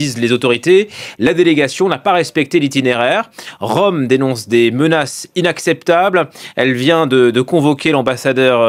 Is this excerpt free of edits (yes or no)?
no